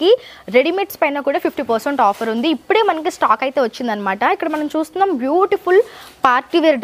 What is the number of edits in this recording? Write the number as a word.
zero